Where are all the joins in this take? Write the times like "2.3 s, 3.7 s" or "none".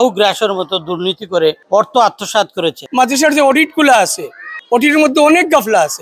1.6 s, 2.8 s, 4.5 s